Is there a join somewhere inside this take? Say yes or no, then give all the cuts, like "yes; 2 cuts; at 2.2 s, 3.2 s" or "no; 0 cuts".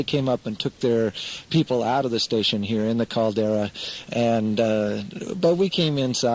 no; 0 cuts